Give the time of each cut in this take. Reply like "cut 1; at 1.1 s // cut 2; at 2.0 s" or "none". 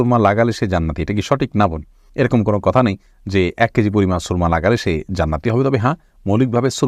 none

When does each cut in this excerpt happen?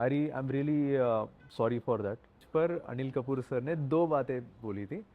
cut 1; at 2.4 s

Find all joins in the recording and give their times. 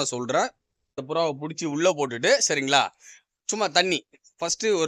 cut 1; at 1.0 s

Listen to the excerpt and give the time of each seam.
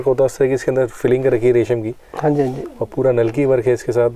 none

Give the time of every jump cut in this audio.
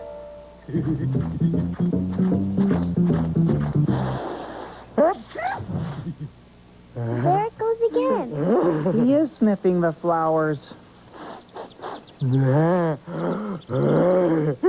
cut 1; at 10.2 s

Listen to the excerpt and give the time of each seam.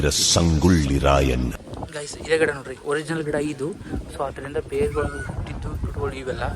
cut 1; at 1.5 s

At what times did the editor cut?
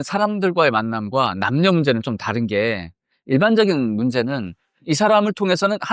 none

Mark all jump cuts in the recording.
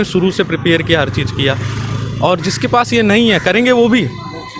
none

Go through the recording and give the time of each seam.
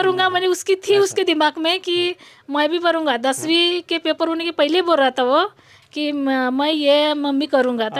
none

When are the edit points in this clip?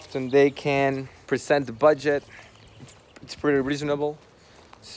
cut 1; at 1.2 s

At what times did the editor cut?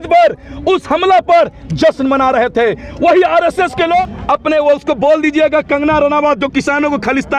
cut 1; at 4.1 s

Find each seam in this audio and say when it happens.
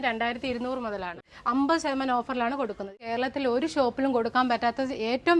cut 1; at 1.2 s // cut 2; at 3.0 s

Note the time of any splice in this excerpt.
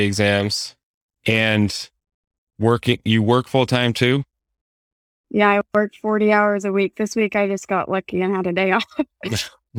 none

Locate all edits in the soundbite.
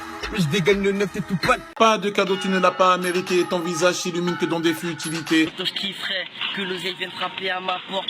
cut 1; at 1.7 s // cut 2; at 5.6 s

